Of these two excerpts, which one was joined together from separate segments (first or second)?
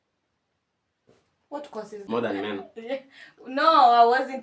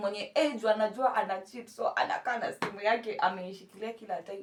first